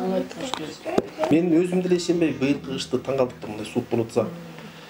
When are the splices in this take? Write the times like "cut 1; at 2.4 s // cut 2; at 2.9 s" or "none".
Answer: cut 1; at 1.3 s